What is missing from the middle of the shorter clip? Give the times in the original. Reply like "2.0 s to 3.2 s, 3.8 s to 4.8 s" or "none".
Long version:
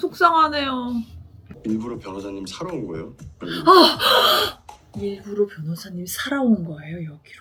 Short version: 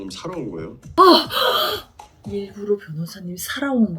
3.3 s to 3.6 s